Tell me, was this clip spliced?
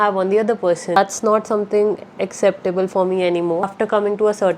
yes; 2 cuts; at 1.0 s, 3.7 s

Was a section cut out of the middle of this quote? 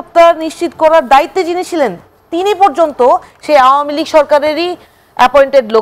no; 0 cuts

